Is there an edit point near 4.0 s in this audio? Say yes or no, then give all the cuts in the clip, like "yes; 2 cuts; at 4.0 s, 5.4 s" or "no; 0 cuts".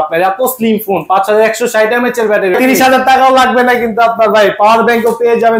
no; 1 cut; at 2.5 s